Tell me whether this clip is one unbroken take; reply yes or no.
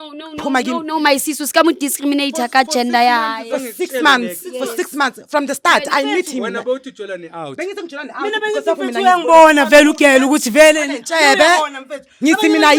yes